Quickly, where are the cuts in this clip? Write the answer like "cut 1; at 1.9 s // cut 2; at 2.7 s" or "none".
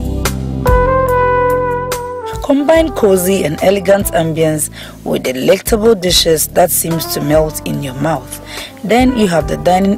none